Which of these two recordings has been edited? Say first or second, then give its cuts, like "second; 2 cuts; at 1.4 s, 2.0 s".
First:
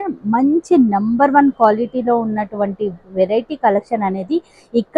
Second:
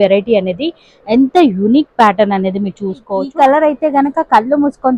second; 1 cut; at 3.1 s